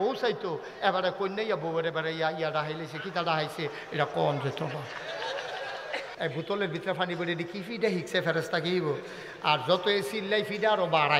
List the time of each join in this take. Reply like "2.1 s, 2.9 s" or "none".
6.1 s